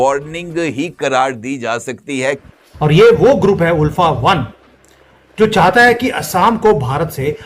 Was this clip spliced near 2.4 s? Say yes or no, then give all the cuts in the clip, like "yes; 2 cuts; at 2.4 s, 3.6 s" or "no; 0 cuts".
yes; 1 cut; at 2.4 s